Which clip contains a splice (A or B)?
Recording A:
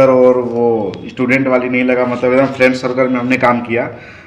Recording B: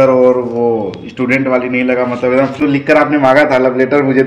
B